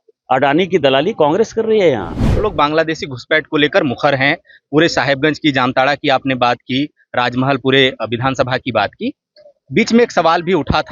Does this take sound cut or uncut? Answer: cut